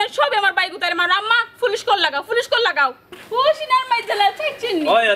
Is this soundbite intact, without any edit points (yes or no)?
no